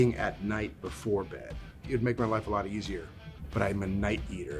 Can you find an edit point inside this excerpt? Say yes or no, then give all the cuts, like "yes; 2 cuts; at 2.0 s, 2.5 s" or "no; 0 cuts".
yes; 2 cuts; at 1.9 s, 3.2 s